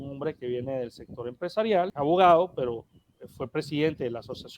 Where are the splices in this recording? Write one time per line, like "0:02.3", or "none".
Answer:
0:01.9